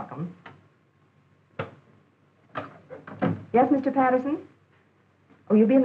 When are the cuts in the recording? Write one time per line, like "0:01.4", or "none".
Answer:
none